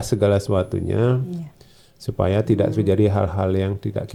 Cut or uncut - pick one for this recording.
uncut